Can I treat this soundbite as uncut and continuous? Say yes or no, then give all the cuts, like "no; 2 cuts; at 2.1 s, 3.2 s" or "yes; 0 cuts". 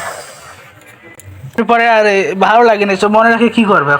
no; 1 cut; at 1.6 s